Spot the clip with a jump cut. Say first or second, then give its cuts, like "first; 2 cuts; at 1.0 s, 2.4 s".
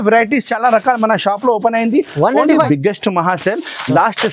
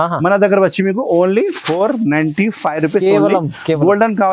first; 1 cut; at 2.7 s